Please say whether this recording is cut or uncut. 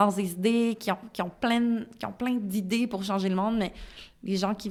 uncut